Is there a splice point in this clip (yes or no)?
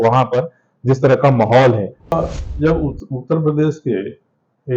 yes